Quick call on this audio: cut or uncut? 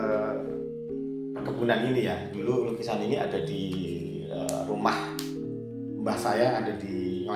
uncut